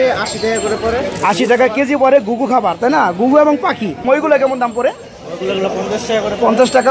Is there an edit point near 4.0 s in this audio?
yes; 1 cut; at 4.0 s

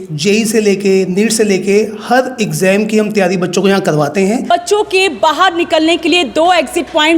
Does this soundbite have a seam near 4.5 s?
yes; 1 cut; at 4.5 s

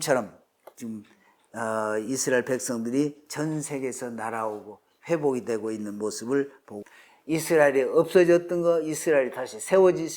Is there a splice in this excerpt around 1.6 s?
no; 1 cut; at 6.8 s

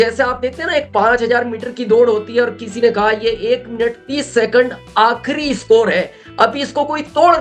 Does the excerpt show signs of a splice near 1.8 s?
no; 0 cuts

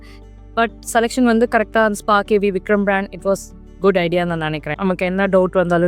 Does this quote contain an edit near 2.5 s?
no; 1 cut; at 4.7 s

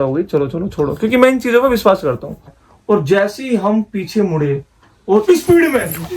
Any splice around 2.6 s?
yes; 1 cut; at 2.6 s

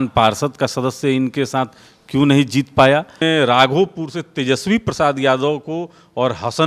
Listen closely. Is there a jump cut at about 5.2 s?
no; 1 cut; at 3.1 s

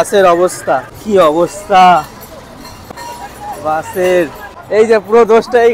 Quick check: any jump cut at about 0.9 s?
yes; 3 cuts; at 0.9 s, 2.8 s, 4.5 s

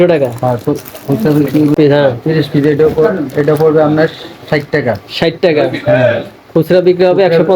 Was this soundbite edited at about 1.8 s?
yes; 1 cut; at 1.8 s

